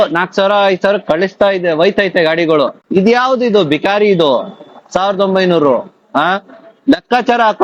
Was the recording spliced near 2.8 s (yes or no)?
yes